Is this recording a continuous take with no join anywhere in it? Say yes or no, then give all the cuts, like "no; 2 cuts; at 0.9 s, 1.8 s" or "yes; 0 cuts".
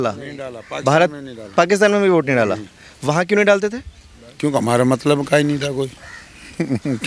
yes; 0 cuts